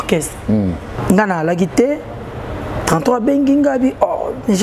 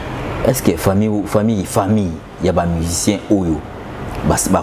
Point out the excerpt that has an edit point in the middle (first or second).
first